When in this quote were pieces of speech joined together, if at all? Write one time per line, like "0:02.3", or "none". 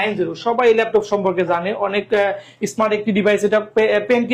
none